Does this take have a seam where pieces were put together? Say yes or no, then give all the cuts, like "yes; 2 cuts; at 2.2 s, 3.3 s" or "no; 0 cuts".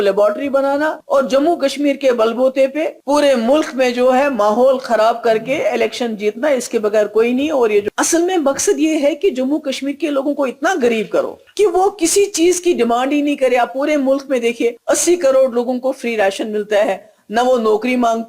yes; 5 cuts; at 1.0 s, 3.0 s, 7.8 s, 11.4 s, 14.8 s